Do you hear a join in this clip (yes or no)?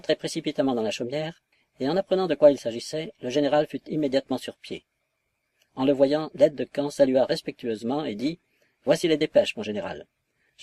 no